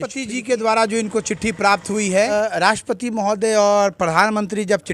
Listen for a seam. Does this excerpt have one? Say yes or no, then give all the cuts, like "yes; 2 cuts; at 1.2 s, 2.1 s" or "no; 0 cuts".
yes; 1 cut; at 2.3 s